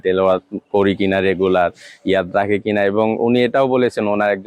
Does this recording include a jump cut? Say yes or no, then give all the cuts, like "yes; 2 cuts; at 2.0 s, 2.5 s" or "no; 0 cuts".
no; 0 cuts